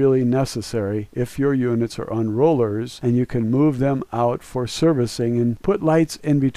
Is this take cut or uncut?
uncut